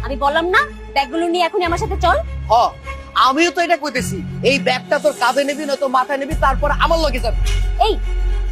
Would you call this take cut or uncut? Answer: cut